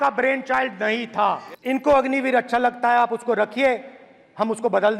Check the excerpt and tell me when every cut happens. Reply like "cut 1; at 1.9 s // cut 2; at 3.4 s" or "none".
cut 1; at 1.5 s